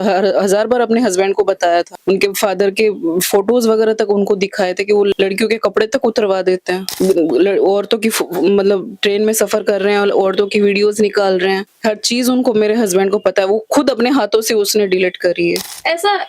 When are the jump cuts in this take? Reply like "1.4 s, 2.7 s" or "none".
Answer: 5.1 s, 11.7 s